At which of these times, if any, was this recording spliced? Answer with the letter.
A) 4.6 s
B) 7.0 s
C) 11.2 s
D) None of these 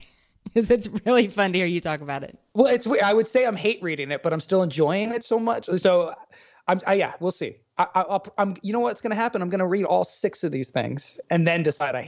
C